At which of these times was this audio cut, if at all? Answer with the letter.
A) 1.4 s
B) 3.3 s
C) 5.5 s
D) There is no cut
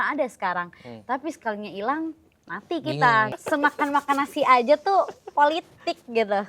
B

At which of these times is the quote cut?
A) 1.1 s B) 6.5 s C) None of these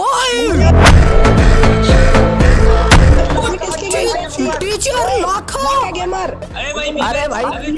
B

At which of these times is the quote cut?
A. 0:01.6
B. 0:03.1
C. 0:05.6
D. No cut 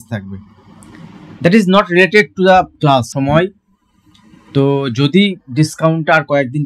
B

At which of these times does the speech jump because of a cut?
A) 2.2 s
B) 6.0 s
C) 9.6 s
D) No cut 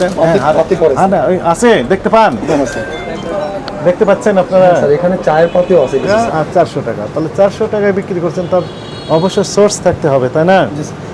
B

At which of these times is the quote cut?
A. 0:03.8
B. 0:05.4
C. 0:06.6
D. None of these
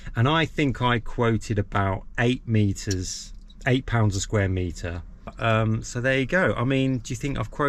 B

